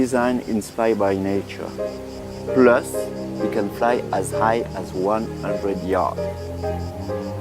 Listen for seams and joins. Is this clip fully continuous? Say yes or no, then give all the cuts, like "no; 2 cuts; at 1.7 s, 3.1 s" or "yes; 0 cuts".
no; 1 cut; at 2.9 s